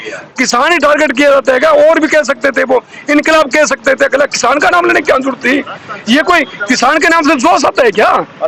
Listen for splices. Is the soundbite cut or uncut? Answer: uncut